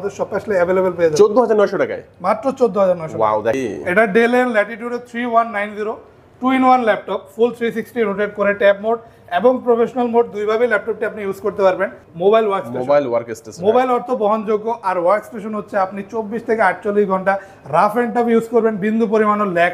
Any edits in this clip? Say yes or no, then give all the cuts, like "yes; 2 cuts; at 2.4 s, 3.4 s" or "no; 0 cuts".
yes; 2 cuts; at 3.6 s, 12.0 s